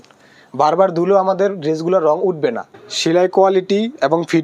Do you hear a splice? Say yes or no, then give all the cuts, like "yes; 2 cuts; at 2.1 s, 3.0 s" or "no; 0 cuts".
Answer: yes; 1 cut; at 2.7 s